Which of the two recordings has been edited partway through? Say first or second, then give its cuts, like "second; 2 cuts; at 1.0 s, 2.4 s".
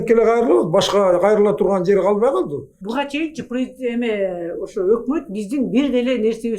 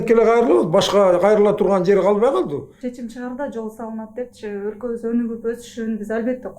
second; 1 cut; at 2.7 s